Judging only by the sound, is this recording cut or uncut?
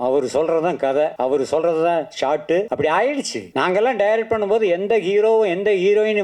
cut